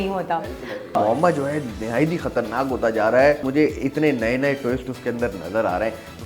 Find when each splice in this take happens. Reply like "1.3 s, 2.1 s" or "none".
0.9 s, 3.4 s